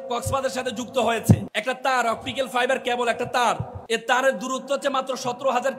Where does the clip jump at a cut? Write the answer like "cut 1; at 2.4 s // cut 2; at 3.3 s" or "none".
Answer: cut 1; at 1.5 s // cut 2; at 3.7 s